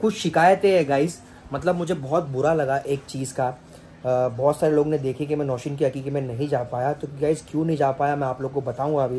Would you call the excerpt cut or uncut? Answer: uncut